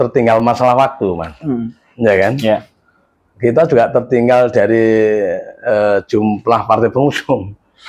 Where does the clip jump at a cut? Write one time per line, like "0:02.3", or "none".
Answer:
none